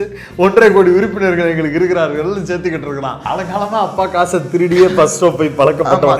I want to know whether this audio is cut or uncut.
cut